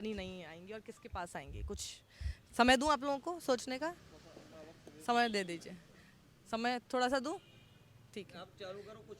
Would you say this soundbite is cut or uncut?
uncut